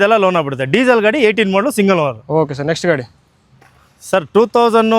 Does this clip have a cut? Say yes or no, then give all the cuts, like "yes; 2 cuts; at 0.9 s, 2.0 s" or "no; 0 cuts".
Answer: no; 0 cuts